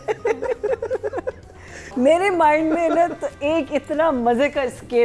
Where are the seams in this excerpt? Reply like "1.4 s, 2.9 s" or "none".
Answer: 1.9 s